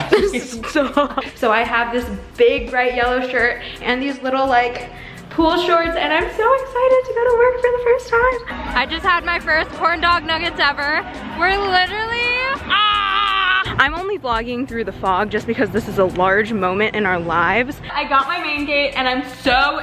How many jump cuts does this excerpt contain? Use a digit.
4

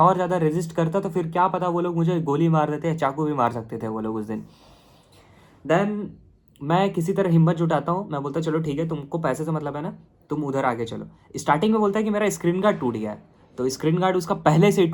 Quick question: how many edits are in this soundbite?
0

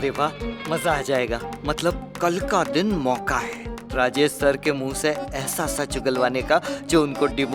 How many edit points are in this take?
0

